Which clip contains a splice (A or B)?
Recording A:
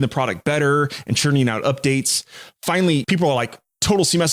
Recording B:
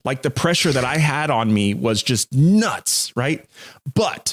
A